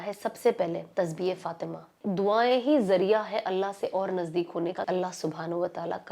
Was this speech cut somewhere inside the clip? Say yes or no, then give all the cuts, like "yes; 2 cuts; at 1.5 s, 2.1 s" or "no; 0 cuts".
yes; 3 cuts; at 0.9 s, 2.0 s, 4.8 s